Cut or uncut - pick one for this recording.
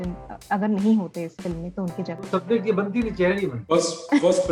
uncut